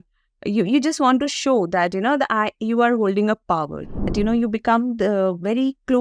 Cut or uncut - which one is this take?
cut